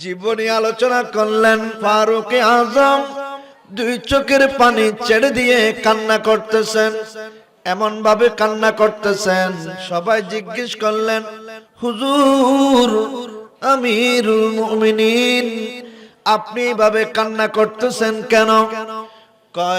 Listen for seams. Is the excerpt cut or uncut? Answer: cut